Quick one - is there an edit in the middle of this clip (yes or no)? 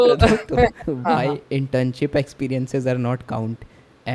yes